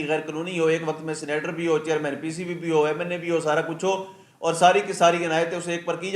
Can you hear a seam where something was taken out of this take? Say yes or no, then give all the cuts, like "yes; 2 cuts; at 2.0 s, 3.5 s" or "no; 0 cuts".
no; 0 cuts